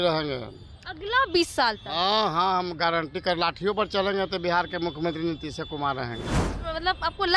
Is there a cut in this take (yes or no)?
yes